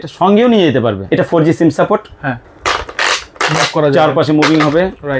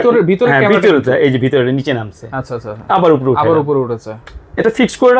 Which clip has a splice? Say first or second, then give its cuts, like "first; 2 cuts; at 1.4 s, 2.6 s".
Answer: first; 2 cuts; at 1.0 s, 2.5 s